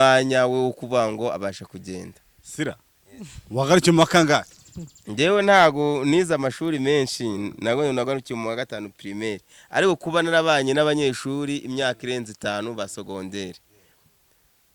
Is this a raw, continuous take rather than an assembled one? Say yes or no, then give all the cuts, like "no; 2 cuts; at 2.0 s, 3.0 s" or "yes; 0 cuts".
yes; 0 cuts